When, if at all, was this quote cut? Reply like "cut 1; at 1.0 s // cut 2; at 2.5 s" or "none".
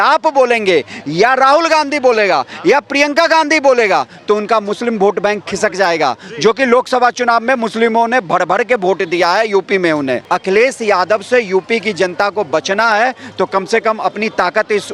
cut 1; at 10.2 s

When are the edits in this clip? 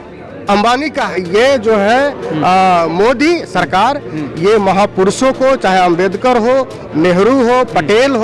cut 1; at 1.1 s

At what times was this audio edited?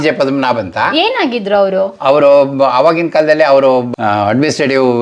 none

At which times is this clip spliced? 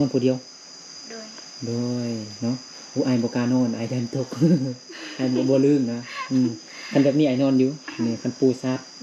none

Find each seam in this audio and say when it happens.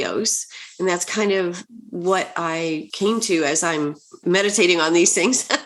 cut 1; at 2.9 s // cut 2; at 4.1 s

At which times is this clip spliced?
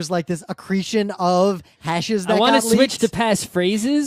none

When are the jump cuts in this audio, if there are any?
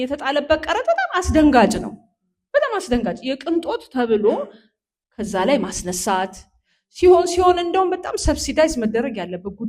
none

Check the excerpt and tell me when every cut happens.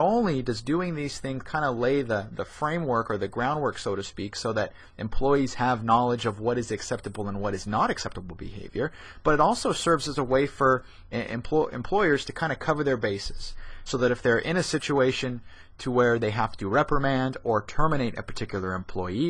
none

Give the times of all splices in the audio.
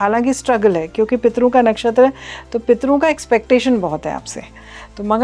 none

